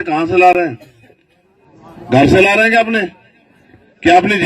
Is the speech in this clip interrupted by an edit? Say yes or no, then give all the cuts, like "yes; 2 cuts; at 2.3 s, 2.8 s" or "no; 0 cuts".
no; 0 cuts